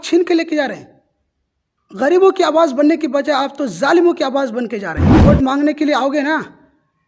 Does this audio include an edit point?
yes; 1 cut; at 5.1 s

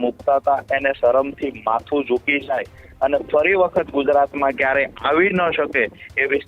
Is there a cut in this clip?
no; 0 cuts

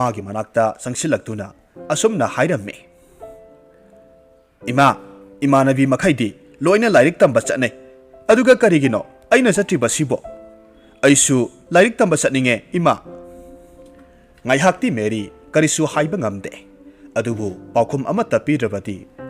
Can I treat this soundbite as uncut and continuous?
no; 2 cuts; at 13.0 s, 14.4 s

